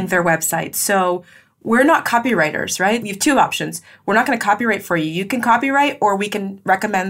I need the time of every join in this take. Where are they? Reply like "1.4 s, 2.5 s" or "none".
3.1 s